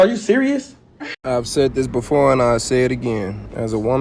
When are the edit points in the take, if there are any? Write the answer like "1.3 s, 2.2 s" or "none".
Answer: 1.1 s